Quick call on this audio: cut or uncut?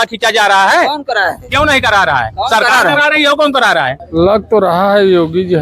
cut